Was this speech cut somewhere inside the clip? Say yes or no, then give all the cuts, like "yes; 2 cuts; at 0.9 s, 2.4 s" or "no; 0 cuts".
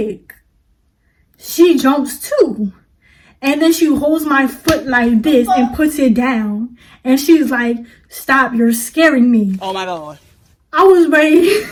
no; 0 cuts